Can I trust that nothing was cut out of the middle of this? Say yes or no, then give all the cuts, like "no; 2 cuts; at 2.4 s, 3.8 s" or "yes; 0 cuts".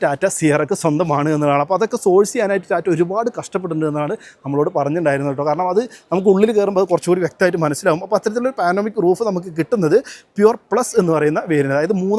yes; 0 cuts